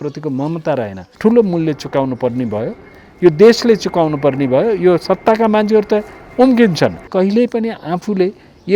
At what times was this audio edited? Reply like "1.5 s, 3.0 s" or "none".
1.0 s, 7.1 s